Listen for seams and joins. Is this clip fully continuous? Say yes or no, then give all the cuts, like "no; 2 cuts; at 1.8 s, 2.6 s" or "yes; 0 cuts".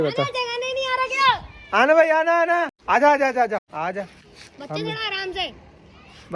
no; 2 cuts; at 2.8 s, 3.7 s